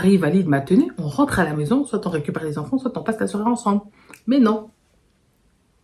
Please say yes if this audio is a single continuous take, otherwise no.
yes